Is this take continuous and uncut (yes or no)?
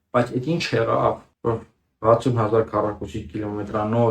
no